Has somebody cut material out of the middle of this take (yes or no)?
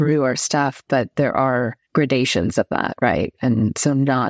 yes